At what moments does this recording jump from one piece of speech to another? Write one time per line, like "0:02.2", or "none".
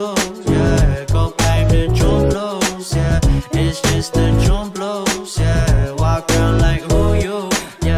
0:01.4

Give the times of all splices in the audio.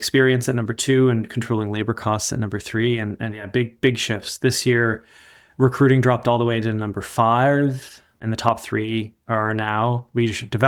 none

